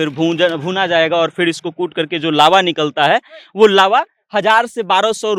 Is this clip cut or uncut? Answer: uncut